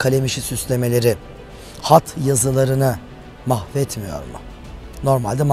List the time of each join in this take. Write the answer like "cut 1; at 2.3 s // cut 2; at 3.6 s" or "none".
none